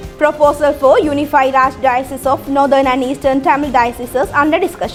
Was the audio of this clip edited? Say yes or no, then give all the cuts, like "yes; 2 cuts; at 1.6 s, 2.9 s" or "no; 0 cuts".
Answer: no; 0 cuts